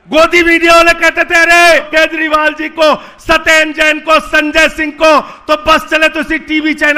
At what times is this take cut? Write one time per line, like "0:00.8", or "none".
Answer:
0:01.9